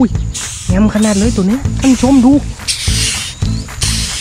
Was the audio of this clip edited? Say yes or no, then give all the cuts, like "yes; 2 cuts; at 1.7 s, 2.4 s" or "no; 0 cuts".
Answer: no; 0 cuts